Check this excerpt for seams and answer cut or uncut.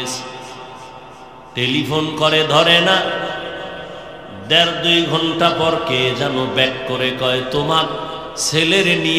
uncut